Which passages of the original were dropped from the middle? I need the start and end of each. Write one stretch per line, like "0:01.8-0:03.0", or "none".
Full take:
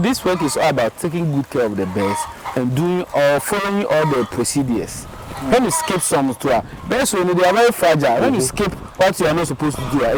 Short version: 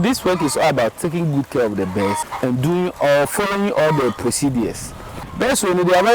0:02.3-0:02.4
0:05.4-0:06.7